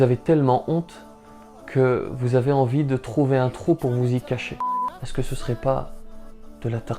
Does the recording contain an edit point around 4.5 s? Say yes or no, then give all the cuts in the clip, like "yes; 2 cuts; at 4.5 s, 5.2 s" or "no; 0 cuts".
yes; 1 cut; at 4.5 s